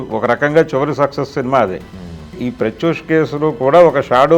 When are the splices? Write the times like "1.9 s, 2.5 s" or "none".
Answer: 2.4 s